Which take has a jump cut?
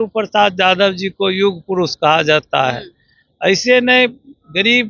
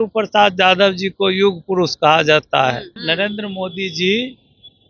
second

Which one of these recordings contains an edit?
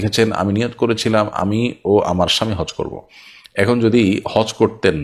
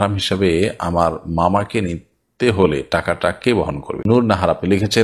second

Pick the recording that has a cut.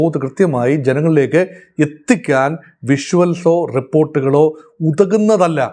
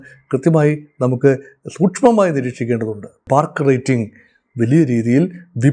second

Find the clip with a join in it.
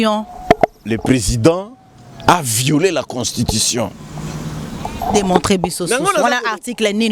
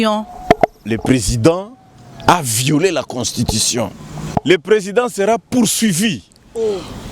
second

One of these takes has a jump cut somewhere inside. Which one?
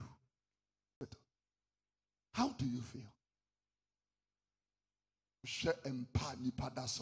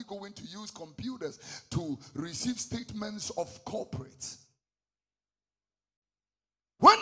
first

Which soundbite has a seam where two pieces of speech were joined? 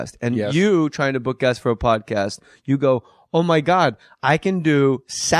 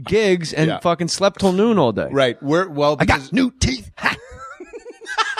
second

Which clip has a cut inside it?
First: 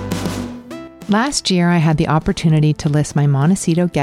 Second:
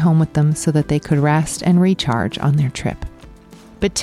first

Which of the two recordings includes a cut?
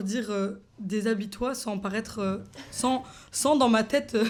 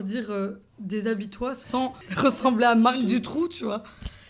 second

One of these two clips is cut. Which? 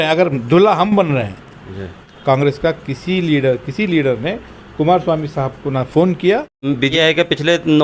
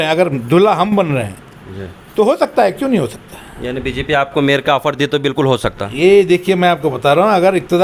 first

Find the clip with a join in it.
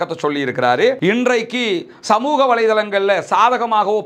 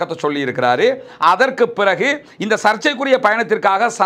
first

